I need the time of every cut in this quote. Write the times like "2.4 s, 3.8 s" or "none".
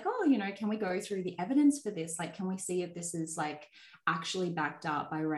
none